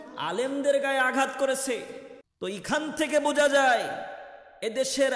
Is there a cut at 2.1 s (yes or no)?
yes